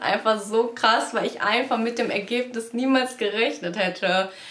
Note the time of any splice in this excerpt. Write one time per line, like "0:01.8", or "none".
none